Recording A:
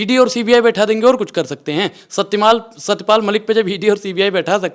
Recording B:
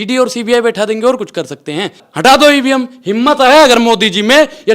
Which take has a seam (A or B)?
B